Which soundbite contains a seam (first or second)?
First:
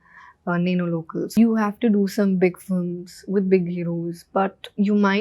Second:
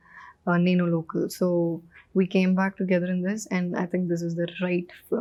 first